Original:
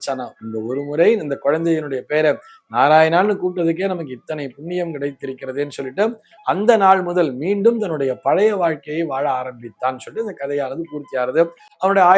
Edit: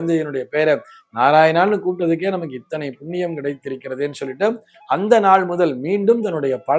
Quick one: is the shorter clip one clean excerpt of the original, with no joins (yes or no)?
yes